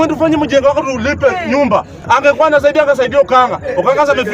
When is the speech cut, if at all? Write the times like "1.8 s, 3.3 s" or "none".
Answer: 1.9 s

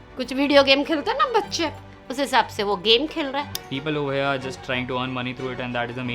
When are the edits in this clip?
3.6 s

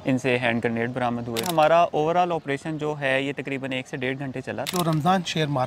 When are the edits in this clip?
1.5 s, 4.7 s

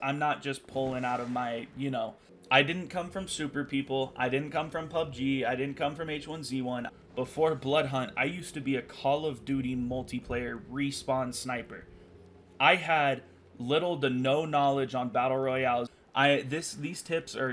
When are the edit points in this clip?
2.3 s, 6.9 s, 15.9 s

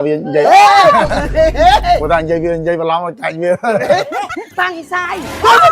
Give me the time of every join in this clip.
4.5 s

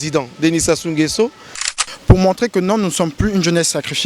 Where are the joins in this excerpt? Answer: 1.7 s

